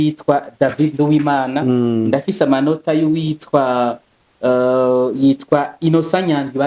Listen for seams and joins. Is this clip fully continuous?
yes; 0 cuts

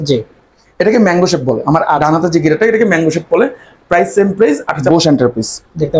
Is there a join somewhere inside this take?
yes; 1 cut; at 4.9 s

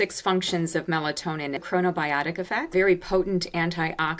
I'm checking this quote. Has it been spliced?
yes; 2 cuts; at 1.6 s, 2.7 s

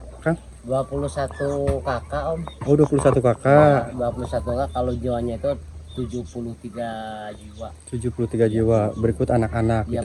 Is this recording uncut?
yes; 0 cuts

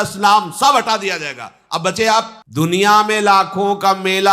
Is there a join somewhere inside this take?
yes; 1 cut; at 2.4 s

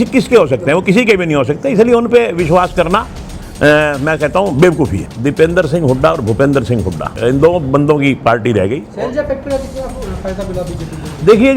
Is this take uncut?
no; 3 cuts; at 5.1 s, 7.1 s, 8.9 s

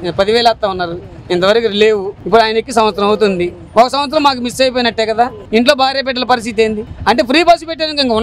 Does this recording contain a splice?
yes; 2 cuts; at 5.4 s, 6.9 s

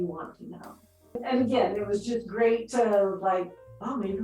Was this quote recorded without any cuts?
no; 1 cut; at 1.2 s

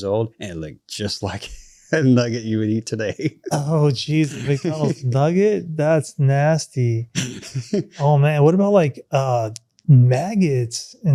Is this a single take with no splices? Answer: yes; 0 cuts

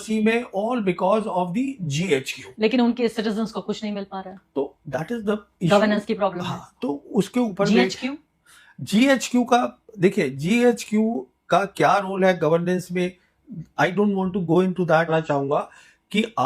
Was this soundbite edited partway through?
yes; 1 cut; at 15.1 s

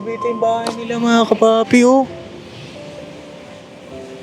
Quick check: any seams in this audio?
no; 0 cuts

